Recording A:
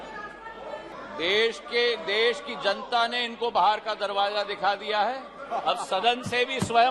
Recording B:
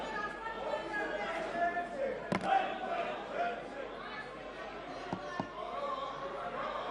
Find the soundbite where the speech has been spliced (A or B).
A